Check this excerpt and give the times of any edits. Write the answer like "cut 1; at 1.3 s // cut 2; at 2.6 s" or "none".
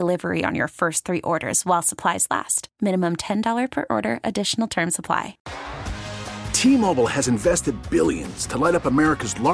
cut 1; at 5.4 s

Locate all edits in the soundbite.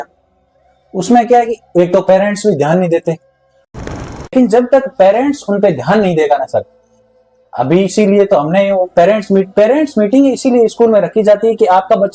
cut 1; at 3.7 s

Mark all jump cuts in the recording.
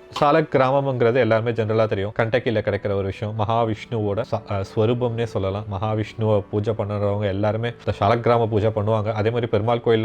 cut 1; at 2.1 s // cut 2; at 4.3 s // cut 3; at 7.8 s

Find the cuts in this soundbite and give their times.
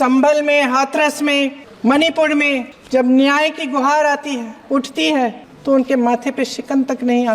cut 1; at 1.7 s // cut 2; at 2.7 s // cut 3; at 4.5 s // cut 4; at 5.5 s

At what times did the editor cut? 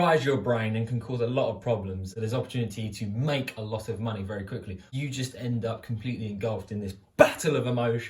cut 1; at 2.1 s // cut 2; at 4.9 s

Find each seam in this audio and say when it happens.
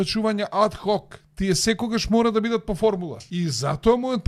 cut 1; at 1.2 s // cut 2; at 3.2 s

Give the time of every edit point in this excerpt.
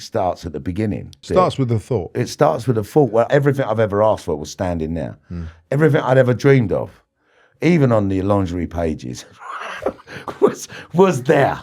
cut 1; at 1.2 s // cut 2; at 3.3 s

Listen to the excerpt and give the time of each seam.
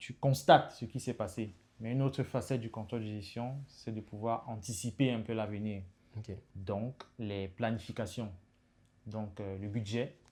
none

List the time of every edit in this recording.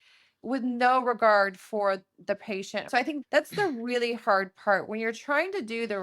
cut 1; at 2.9 s

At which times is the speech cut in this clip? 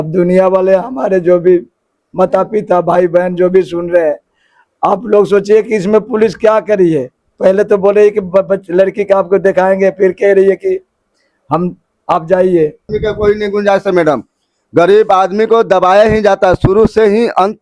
cut 1; at 12.8 s

